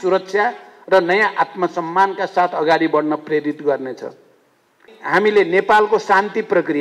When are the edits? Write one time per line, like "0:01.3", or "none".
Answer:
0:04.9